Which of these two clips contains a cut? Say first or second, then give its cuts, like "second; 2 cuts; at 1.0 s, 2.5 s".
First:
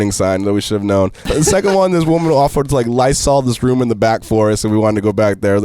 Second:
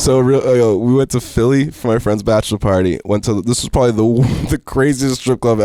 first; 1 cut; at 1.3 s